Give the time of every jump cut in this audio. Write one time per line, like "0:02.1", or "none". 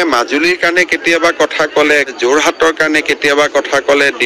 0:02.1